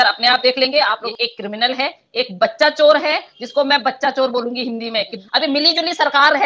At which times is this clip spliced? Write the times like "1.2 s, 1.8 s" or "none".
1.1 s, 5.2 s